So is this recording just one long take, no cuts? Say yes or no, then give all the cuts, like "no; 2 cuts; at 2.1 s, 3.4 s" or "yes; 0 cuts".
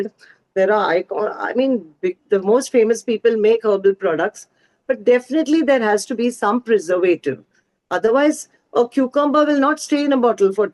yes; 0 cuts